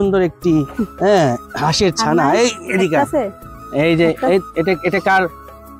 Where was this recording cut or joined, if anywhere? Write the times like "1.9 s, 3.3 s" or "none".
none